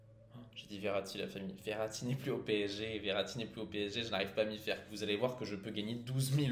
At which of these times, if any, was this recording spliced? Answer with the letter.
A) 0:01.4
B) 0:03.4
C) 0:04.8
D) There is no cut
C